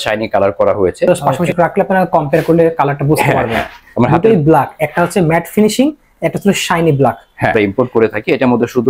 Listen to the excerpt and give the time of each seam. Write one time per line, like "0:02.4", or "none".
0:01.1
0:07.5